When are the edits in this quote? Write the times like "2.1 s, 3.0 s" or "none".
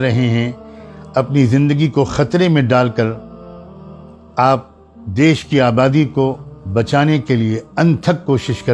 none